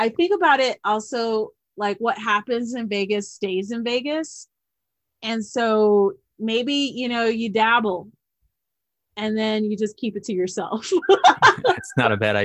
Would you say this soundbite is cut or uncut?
uncut